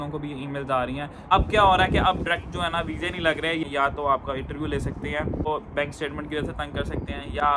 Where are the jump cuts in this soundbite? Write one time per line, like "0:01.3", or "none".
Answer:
0:01.2
0:03.7
0:05.4